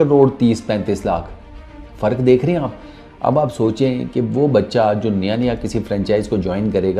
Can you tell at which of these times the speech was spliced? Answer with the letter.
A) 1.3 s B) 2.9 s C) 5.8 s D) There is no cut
D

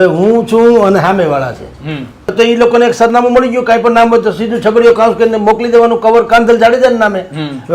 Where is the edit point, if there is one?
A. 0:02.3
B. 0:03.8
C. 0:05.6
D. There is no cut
A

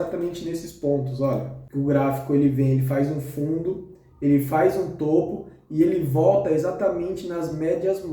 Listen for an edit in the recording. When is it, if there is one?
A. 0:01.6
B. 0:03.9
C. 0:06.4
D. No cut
A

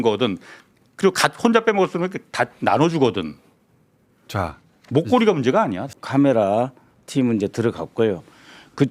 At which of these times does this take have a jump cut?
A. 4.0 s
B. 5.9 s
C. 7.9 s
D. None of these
B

